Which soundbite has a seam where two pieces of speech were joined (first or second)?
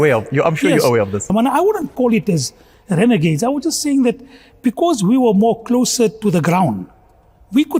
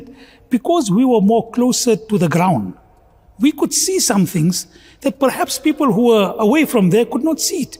first